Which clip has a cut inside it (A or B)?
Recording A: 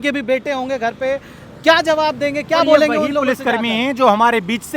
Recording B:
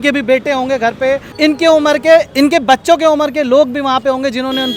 B